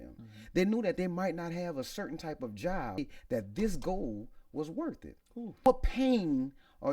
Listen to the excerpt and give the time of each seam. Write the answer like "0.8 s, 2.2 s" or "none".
3.1 s, 5.7 s

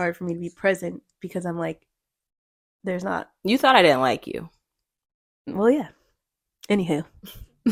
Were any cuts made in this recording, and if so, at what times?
none

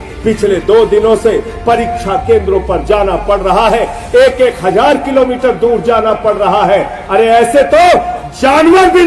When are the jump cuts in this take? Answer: none

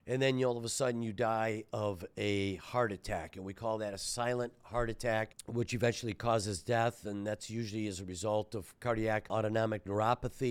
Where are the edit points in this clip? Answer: 5.4 s, 9.3 s

